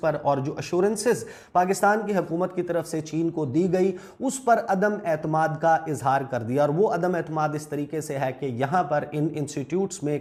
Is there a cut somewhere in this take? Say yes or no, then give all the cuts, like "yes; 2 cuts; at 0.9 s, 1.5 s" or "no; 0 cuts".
no; 0 cuts